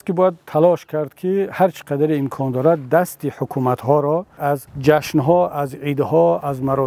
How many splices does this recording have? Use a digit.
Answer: 1